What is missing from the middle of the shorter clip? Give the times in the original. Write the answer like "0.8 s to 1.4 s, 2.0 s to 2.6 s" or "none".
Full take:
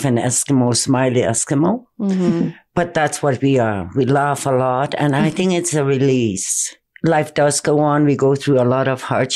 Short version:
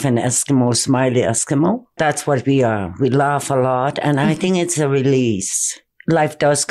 1.9 s to 2.9 s